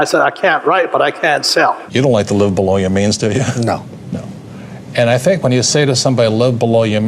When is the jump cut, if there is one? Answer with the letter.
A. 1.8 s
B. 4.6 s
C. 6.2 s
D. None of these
A